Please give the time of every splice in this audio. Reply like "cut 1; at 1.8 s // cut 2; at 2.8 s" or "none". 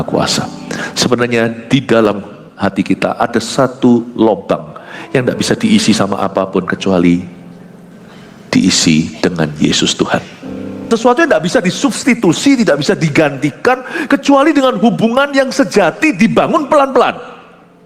cut 1; at 10.9 s